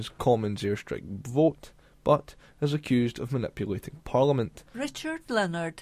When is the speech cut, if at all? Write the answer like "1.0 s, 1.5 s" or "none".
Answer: 4.6 s